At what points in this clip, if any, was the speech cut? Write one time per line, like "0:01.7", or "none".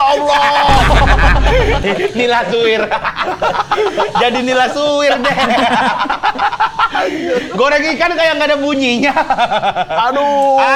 none